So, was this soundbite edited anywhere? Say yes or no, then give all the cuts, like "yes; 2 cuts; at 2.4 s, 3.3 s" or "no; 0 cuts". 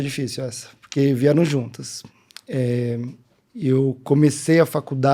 no; 0 cuts